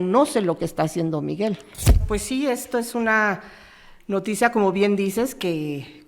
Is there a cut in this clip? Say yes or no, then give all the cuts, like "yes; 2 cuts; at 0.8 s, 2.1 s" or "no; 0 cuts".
yes; 1 cut; at 2.0 s